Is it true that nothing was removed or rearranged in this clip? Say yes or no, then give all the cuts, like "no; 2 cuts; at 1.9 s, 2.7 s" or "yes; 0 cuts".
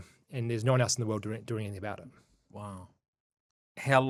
yes; 0 cuts